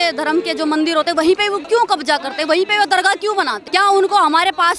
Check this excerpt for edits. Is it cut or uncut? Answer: cut